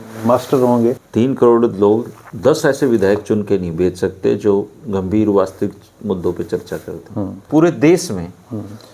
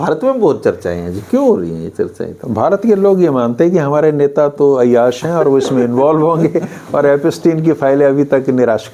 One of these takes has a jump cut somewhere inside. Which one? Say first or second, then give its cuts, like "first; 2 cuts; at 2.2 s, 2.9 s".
first; 2 cuts; at 1.0 s, 7.5 s